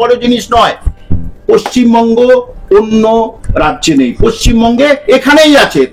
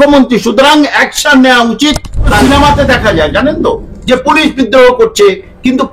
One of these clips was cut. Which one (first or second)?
second